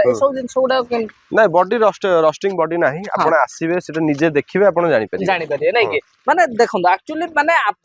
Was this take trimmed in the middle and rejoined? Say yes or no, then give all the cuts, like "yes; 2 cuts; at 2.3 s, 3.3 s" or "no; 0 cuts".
no; 0 cuts